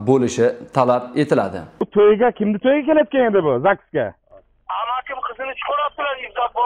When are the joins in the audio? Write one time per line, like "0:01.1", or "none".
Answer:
0:01.7